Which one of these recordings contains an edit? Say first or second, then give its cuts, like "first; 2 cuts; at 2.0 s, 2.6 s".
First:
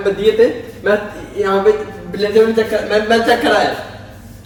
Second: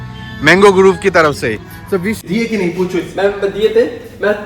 second; 1 cut; at 2.2 s